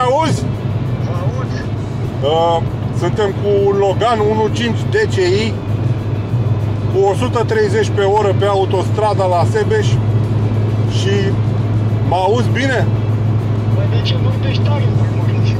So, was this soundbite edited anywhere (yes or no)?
no